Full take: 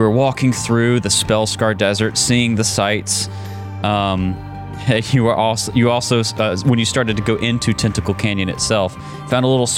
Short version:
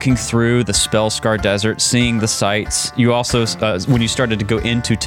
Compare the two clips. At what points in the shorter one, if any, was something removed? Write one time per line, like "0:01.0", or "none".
0:02.9